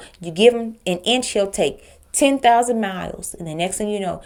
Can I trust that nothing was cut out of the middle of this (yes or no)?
yes